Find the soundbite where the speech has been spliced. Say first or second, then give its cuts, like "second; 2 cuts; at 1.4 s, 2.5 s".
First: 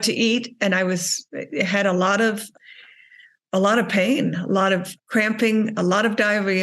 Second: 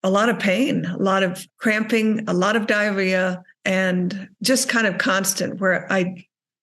first; 1 cut; at 2.5 s